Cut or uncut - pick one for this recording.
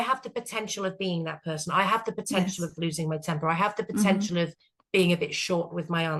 uncut